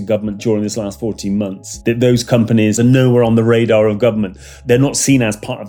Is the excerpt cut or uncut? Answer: cut